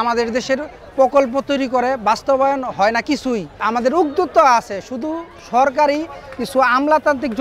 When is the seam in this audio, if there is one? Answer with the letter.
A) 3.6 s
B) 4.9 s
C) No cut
A